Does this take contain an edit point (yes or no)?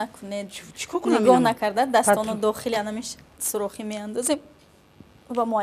no